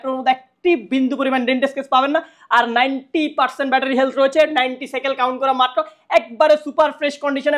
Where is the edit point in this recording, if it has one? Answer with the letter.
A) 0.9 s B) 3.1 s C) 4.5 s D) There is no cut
D